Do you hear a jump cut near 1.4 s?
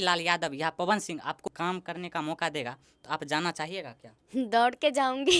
yes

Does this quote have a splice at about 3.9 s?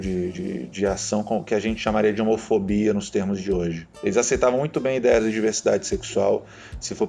yes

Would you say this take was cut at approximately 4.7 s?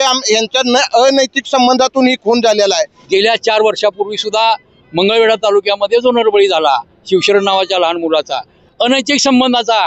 no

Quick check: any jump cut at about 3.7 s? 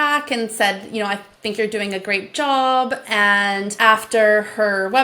yes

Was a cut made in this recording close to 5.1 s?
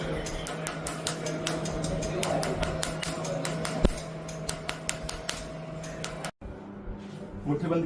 no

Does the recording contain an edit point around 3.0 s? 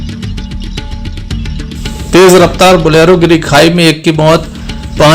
no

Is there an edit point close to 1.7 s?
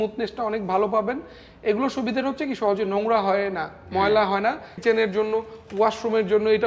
no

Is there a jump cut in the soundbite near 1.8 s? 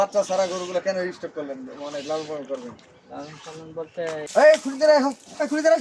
no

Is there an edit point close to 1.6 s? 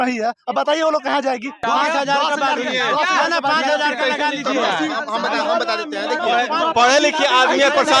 yes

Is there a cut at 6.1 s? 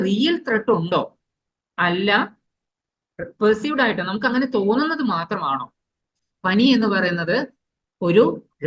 yes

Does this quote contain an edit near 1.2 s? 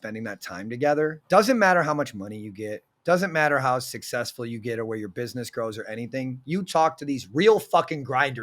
yes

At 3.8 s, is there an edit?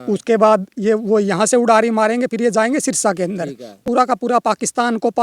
yes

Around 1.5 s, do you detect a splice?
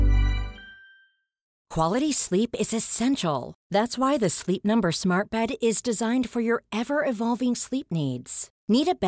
yes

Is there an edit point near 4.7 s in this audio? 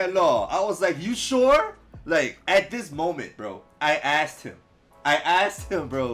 no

